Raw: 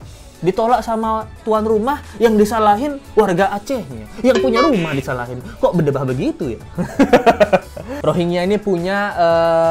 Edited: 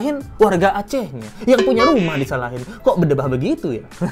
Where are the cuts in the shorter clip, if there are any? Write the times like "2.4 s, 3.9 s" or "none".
none

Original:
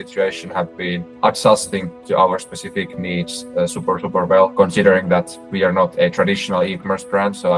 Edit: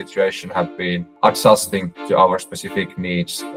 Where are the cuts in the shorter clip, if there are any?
none

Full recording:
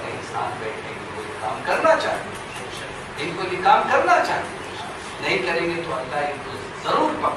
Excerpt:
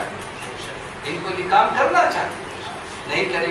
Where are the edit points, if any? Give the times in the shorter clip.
none

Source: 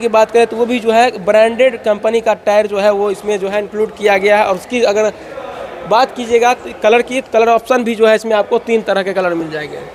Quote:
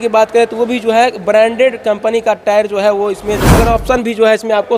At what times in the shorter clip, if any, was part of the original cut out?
3.5 s

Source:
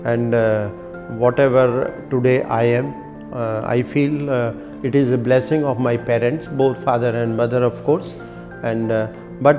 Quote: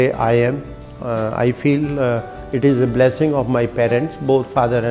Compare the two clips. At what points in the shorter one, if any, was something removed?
none

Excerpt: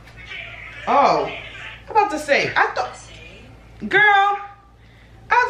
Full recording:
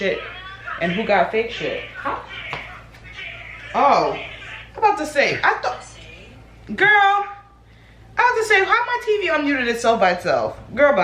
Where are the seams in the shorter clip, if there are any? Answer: none

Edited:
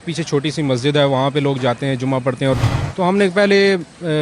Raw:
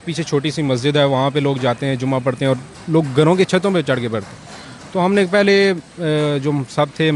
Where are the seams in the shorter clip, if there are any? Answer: 2.7 s

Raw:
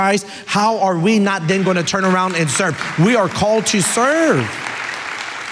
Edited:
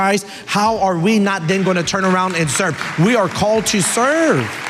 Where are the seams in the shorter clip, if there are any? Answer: none

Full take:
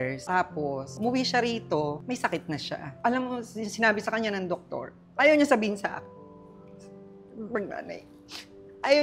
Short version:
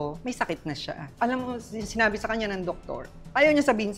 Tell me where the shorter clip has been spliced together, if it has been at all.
none

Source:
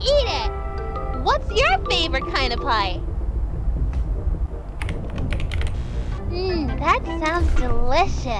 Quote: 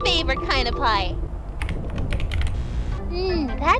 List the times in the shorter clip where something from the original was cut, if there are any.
1.3 s

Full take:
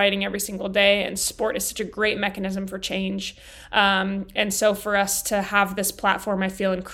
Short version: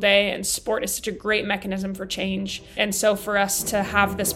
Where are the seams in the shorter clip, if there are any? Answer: 2.7 s

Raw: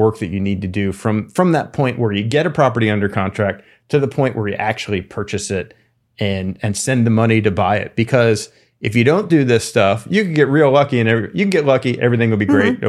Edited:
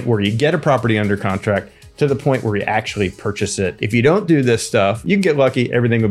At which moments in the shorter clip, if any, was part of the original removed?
3.8 s, 5.0 s

